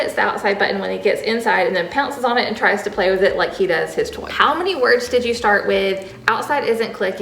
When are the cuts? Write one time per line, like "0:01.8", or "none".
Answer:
0:04.3

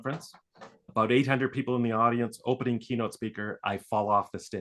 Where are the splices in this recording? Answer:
none

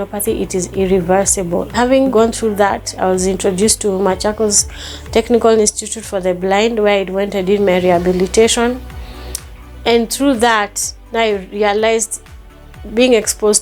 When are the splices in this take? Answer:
0:02.1

